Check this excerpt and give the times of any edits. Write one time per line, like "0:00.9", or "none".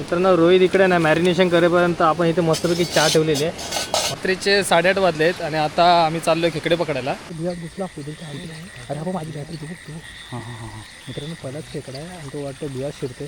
0:04.2
0:07.3